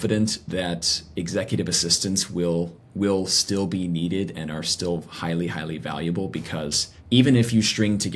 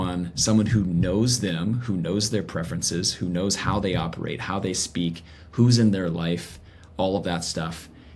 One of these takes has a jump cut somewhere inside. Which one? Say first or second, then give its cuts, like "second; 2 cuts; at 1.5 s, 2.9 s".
first; 1 cut; at 6.9 s